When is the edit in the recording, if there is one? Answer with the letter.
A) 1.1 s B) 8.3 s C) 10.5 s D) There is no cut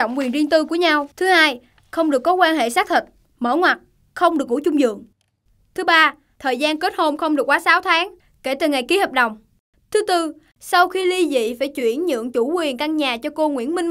A